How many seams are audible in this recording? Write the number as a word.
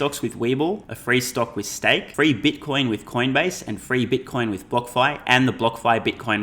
two